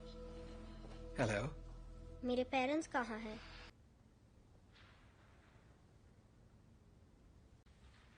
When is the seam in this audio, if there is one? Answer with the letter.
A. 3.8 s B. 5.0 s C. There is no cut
A